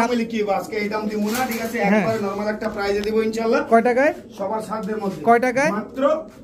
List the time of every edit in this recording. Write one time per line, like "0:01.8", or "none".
none